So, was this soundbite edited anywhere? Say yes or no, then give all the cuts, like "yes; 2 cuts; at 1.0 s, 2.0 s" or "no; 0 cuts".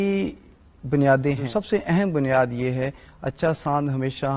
yes; 1 cut; at 1.4 s